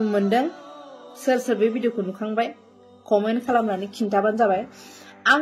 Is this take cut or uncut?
uncut